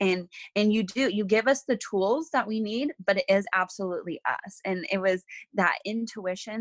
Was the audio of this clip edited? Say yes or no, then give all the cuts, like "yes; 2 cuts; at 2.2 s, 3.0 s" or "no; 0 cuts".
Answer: no; 0 cuts